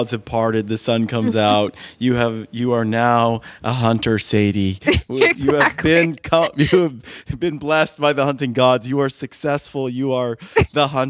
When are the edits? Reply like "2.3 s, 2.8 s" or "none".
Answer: none